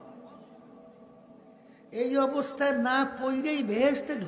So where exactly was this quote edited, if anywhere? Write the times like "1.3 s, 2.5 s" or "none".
none